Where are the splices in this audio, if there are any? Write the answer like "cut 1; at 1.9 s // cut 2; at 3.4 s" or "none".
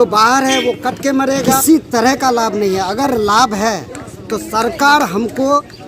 cut 1; at 1.6 s